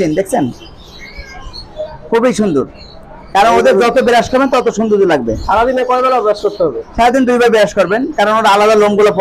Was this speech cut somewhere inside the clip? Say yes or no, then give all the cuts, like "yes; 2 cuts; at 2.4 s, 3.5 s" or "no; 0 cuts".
no; 0 cuts